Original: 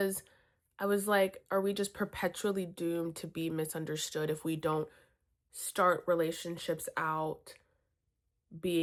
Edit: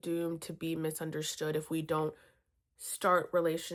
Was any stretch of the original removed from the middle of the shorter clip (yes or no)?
no